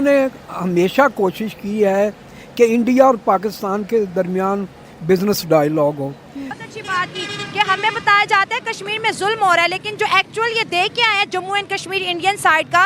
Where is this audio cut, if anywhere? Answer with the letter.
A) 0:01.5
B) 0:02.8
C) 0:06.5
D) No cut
C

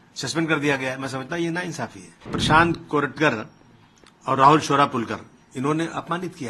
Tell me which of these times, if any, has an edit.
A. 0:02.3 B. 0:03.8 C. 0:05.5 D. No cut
A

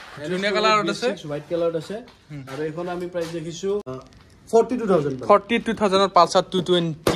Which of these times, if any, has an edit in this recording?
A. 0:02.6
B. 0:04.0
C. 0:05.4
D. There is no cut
B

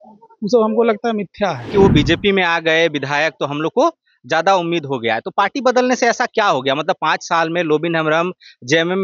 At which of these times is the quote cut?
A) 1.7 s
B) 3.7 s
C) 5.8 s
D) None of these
A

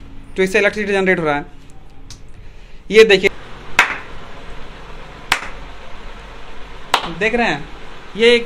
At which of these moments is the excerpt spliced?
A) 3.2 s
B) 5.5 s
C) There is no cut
A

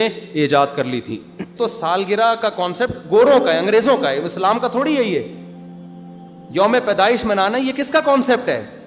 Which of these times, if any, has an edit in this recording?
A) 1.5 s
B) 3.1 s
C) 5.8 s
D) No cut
A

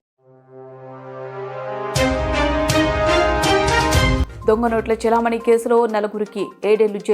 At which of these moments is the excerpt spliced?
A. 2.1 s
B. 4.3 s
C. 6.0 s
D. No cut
B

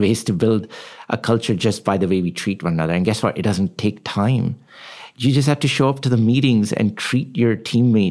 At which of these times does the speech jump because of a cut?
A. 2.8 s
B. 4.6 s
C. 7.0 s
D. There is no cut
D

